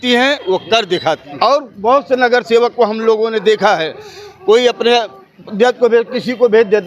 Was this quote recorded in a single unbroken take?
no; 1 cut; at 1.3 s

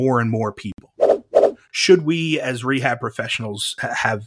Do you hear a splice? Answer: yes; 1 cut; at 1.2 s

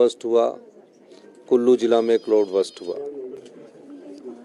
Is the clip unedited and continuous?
no; 1 cut; at 3.4 s

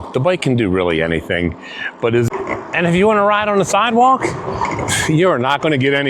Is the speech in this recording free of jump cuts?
no; 1 cut; at 2.3 s

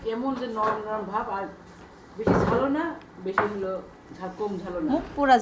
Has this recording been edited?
no; 0 cuts

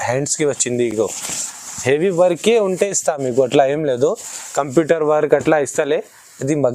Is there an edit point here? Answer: no; 0 cuts

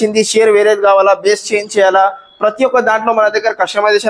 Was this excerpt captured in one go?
yes; 0 cuts

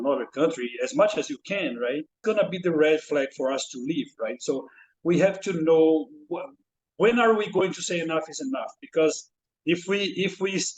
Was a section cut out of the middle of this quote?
yes; 1 cut; at 2.2 s

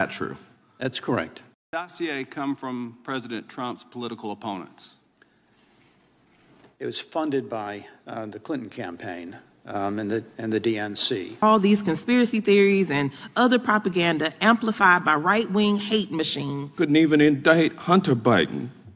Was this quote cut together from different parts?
yes; 3 cuts; at 1.6 s, 11.4 s, 16.6 s

